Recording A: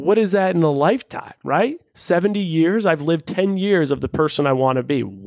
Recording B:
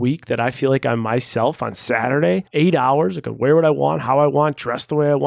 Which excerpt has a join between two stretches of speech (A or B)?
B